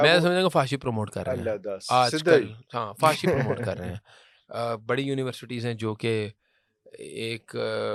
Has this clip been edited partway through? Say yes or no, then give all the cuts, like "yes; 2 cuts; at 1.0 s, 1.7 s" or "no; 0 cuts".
no; 0 cuts